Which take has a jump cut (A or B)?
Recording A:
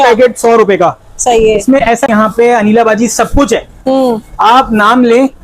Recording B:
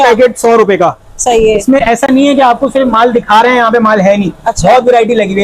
A